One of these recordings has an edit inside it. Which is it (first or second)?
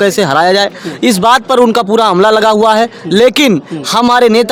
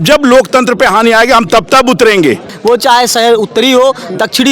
second